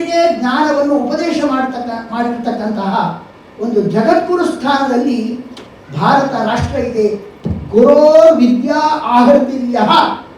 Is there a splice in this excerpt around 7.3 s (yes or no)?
yes